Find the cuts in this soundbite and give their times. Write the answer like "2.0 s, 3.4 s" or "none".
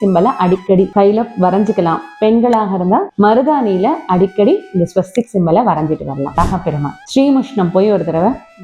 0.9 s, 3.1 s, 6.4 s